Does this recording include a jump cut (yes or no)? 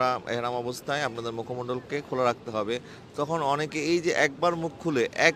no